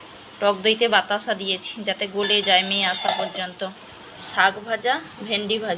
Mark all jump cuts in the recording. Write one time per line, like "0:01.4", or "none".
0:04.2